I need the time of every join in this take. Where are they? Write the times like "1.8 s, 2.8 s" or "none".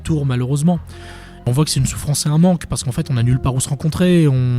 1.5 s

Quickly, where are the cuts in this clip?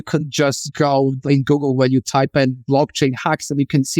1.1 s

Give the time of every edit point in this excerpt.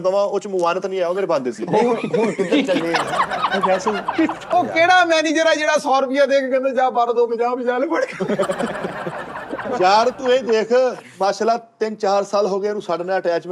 4.6 s

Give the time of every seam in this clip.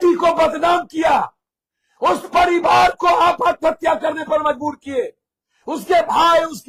none

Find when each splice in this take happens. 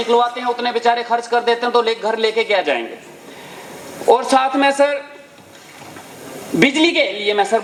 none

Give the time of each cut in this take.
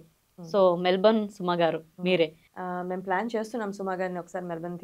2.5 s

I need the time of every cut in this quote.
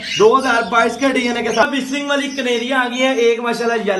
1.6 s

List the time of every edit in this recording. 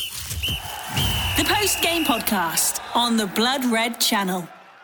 none

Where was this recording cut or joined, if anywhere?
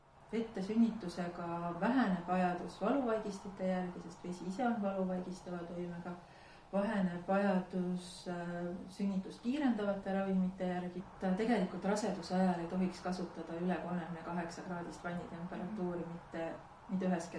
11.0 s

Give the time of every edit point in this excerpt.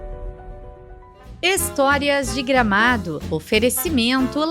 1.4 s

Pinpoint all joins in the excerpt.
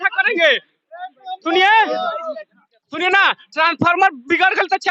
none

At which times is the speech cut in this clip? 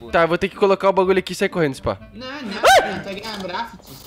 none

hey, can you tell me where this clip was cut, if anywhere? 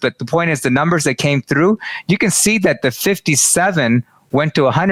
none

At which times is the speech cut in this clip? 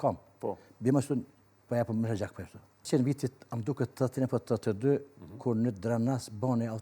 2.9 s

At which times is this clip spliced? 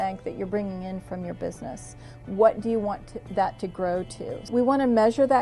4.5 s

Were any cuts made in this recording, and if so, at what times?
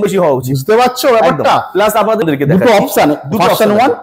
2.2 s

